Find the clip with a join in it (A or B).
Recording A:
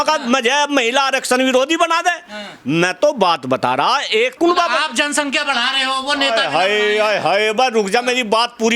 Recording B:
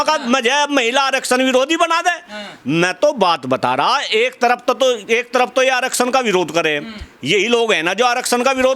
A